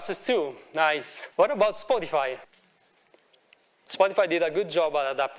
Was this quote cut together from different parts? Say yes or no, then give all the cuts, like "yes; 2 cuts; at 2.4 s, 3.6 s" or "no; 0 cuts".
yes; 2 cuts; at 1.2 s, 2.4 s